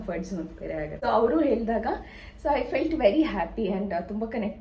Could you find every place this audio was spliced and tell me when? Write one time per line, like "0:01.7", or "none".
0:01.0